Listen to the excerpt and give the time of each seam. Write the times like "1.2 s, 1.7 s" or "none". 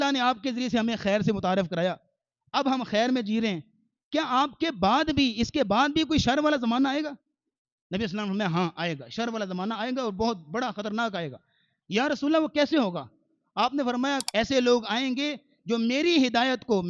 14.2 s

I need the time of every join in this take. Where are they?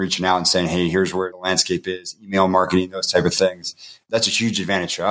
4.0 s

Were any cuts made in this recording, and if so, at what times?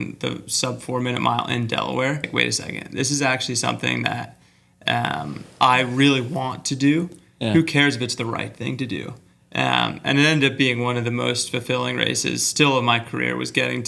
2.2 s

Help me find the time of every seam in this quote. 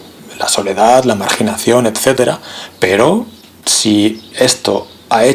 none

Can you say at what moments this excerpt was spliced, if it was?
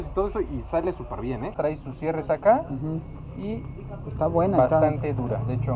1.5 s

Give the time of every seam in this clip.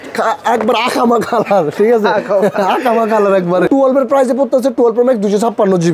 3.7 s

